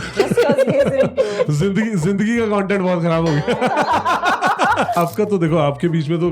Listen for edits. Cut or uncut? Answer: cut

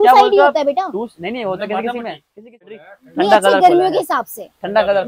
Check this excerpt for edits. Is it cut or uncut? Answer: cut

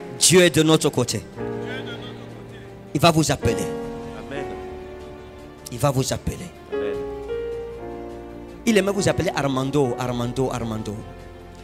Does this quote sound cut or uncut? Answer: cut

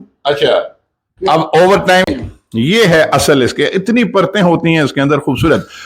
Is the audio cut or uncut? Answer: cut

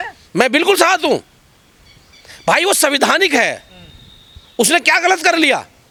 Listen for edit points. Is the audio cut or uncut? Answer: uncut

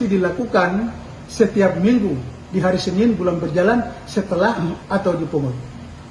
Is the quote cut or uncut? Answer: cut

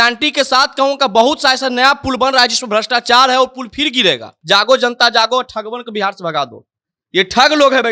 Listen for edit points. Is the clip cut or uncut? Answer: cut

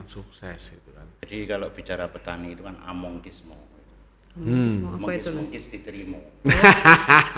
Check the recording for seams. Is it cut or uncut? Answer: cut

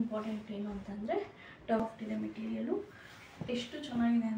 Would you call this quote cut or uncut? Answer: cut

